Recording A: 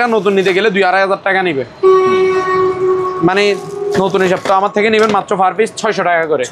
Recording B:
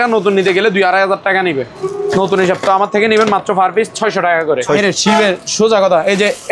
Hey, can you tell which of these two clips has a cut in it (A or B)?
B